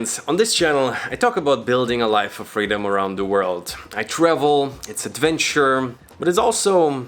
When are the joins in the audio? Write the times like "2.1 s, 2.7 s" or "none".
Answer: 6.0 s